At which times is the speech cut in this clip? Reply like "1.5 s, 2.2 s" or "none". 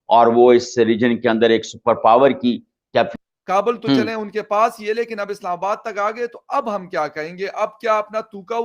3.1 s